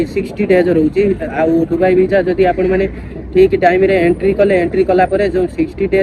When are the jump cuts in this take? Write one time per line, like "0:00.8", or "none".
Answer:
none